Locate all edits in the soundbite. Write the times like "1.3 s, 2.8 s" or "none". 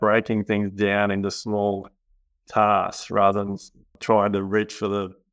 3.9 s